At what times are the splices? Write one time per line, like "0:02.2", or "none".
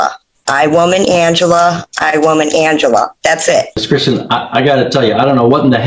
0:03.8